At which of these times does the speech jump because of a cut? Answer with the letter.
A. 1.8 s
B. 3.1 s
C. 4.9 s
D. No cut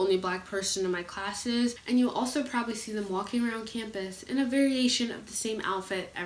A